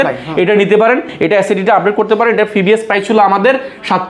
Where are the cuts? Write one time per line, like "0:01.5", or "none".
none